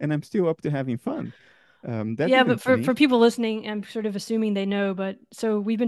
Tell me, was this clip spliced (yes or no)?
no